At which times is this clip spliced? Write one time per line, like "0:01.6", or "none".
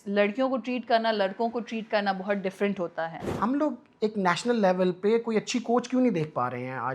0:03.2